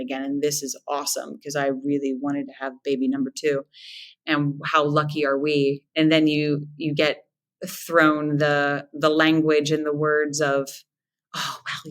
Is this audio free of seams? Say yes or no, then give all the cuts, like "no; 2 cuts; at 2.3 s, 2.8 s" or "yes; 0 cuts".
no; 1 cut; at 5.8 s